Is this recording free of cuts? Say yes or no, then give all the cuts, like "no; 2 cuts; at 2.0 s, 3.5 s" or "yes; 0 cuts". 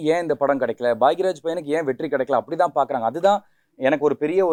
yes; 0 cuts